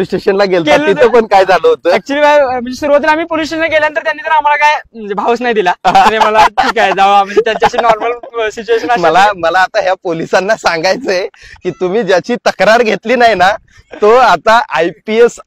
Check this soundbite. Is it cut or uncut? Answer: uncut